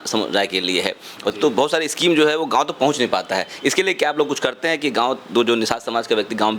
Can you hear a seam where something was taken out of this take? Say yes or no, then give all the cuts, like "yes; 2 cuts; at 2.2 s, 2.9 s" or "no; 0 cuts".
yes; 1 cut; at 1.3 s